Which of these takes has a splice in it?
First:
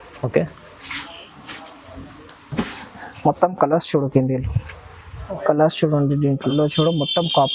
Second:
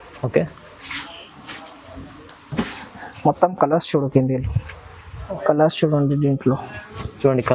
first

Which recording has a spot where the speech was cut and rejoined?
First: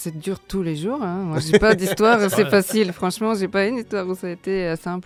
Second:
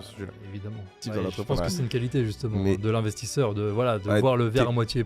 second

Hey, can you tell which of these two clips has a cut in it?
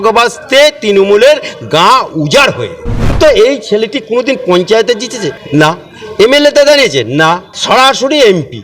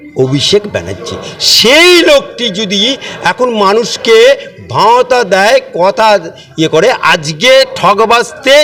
first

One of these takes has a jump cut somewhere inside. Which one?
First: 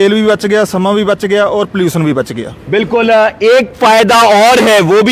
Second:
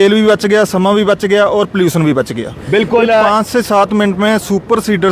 second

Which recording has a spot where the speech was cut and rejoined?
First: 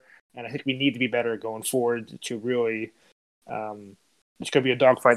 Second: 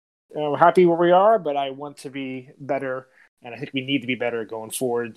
first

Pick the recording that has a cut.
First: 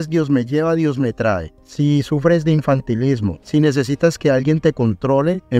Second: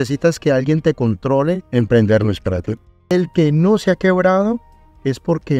second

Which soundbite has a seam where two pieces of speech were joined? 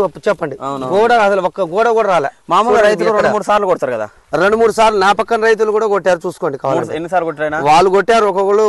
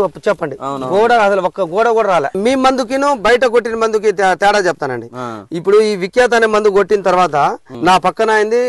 second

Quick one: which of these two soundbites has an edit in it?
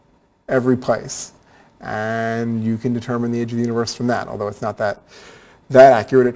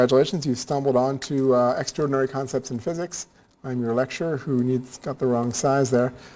second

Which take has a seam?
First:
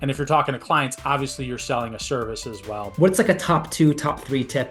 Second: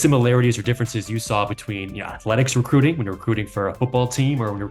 first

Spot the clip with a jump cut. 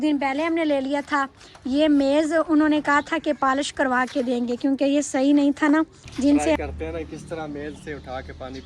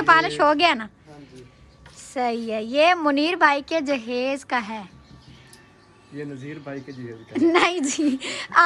first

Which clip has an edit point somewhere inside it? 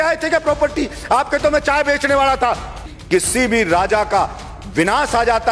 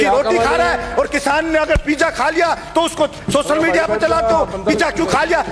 first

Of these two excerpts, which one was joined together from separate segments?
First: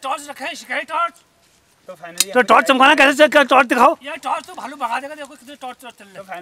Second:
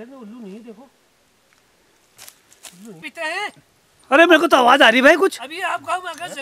second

